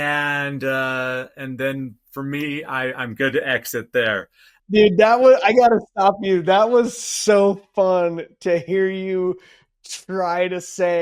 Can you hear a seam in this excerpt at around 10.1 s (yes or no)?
no